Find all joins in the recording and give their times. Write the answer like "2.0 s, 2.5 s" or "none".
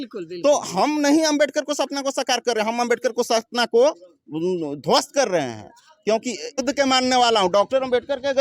6.6 s